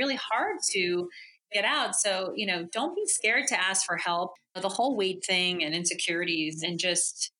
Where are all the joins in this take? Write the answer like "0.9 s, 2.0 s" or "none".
4.4 s